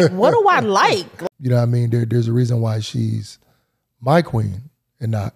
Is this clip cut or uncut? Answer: cut